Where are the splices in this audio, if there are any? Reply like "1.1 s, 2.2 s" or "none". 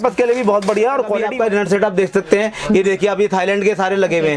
1.3 s